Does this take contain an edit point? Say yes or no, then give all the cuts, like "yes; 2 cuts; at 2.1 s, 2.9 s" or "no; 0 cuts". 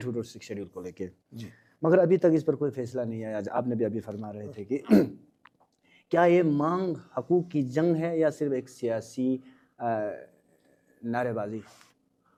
no; 0 cuts